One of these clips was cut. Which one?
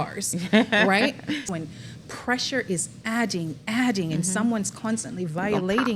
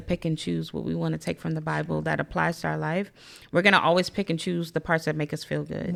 first; 1 cut; at 1.5 s

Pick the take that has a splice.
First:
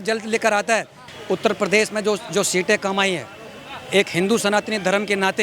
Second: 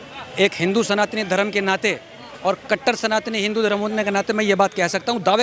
first; 1 cut; at 1.0 s

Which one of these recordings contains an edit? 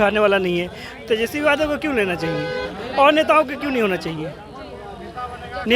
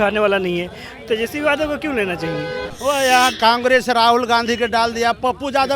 second; 1 cut; at 2.6 s

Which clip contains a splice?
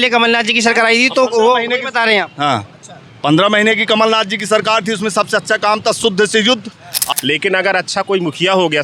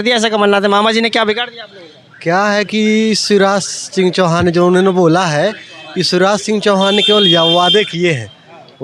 first; 1 cut; at 7.0 s

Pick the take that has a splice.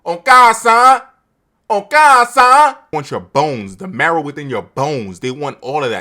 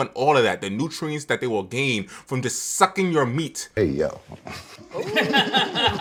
first; 1 cut; at 2.9 s

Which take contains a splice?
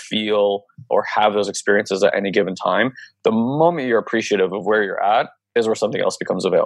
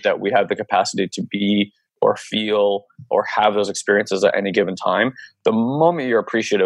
first; 1 cut; at 5.4 s

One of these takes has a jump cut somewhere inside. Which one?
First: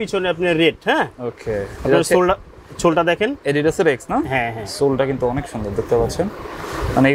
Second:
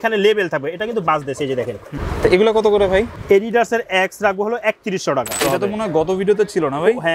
second; 3 cuts; at 1.9 s, 3.1 s, 5.4 s

